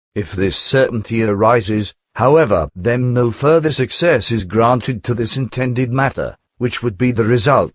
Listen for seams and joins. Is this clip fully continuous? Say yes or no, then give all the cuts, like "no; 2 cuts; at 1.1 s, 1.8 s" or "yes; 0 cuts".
no; 1 cut; at 1.5 s